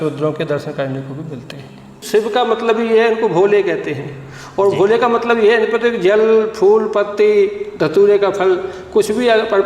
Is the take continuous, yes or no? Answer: no